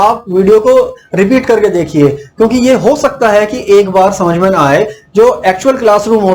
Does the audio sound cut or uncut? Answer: uncut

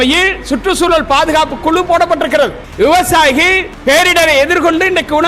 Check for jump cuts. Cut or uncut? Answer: cut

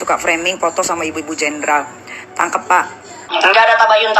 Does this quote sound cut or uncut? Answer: cut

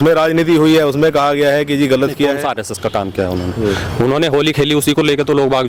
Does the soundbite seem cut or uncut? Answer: cut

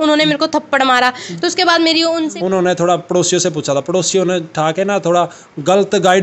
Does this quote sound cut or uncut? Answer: cut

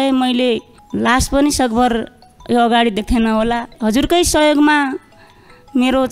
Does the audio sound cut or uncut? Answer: uncut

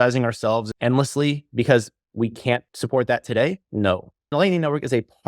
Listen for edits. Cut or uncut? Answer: cut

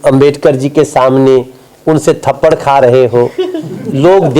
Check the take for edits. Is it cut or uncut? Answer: uncut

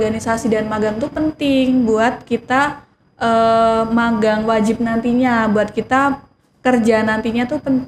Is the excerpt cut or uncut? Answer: uncut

